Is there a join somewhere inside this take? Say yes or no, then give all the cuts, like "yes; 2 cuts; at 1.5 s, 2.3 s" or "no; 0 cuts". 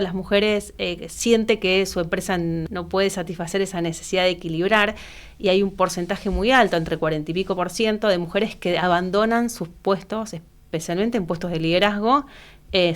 yes; 1 cut; at 2.6 s